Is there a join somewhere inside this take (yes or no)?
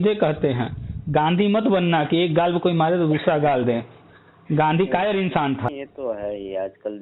yes